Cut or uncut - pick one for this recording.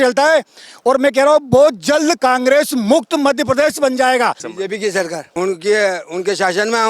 cut